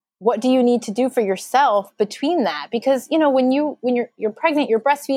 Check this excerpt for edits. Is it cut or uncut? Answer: uncut